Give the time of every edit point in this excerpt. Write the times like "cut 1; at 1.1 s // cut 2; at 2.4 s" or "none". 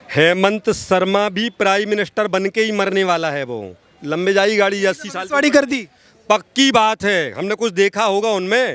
none